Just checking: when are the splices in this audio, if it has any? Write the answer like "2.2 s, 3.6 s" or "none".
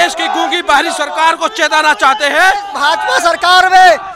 2.7 s